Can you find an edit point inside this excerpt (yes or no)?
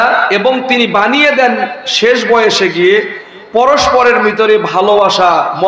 no